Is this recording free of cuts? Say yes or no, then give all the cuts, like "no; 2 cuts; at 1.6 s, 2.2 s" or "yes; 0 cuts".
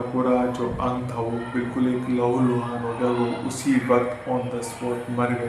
yes; 0 cuts